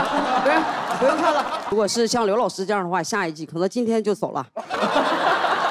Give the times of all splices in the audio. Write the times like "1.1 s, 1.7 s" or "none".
1.7 s